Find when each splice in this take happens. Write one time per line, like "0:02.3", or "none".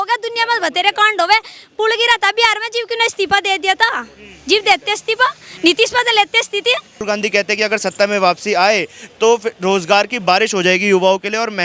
0:07.0